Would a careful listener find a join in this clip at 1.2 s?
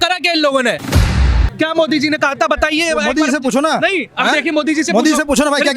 yes; 1 cut; at 1.2 s

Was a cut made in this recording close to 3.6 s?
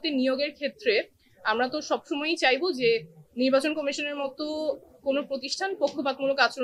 no; 0 cuts

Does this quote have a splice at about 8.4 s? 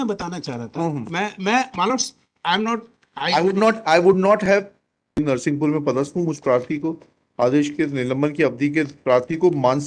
no; 1 cut; at 5.2 s

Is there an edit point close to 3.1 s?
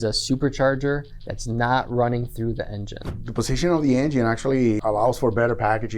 yes; 2 cuts; at 3.1 s, 4.8 s

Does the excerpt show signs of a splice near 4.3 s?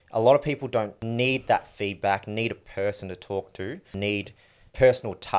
yes; 2 cuts; at 1.0 s, 4.3 s

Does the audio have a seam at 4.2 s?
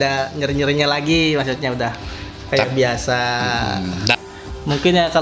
yes; 1 cut; at 4.2 s

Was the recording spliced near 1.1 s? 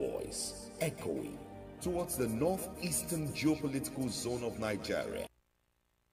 no; 1 cut; at 5.2 s

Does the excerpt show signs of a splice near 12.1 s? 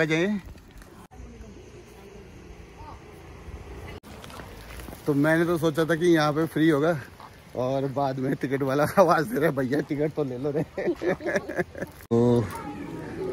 yes; 2 cuts; at 4.0 s, 12.1 s

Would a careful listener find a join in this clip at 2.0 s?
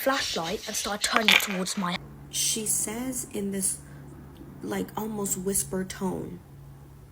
yes; 1 cut; at 2.0 s

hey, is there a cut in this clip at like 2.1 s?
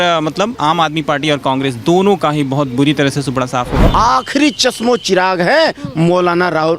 no; 1 cut; at 3.8 s

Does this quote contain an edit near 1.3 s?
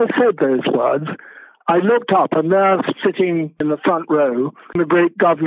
no; 2 cuts; at 3.6 s, 4.7 s

